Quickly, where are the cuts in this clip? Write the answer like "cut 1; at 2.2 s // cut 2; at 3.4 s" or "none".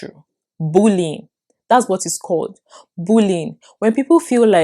none